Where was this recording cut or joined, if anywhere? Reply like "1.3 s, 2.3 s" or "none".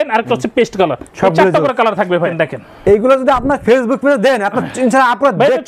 2.3 s